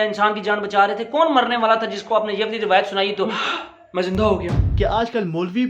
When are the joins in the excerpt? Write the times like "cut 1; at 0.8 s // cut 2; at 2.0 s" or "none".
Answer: cut 1; at 4.6 s